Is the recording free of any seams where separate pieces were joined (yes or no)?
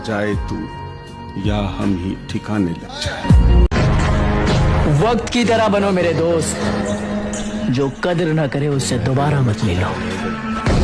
no